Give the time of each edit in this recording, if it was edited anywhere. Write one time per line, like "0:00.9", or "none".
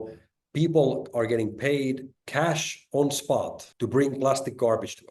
0:02.1
0:03.6